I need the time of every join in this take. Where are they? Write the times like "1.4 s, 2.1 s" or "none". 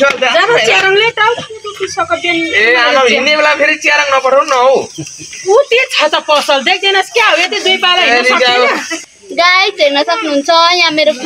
8.9 s